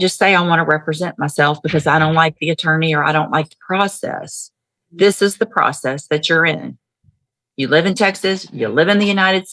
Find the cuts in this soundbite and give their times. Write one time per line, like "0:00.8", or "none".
none